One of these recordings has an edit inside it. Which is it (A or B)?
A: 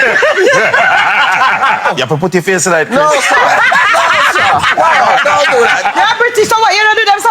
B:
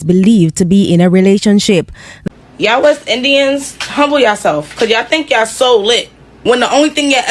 B